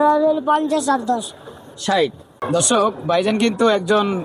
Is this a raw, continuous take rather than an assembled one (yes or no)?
no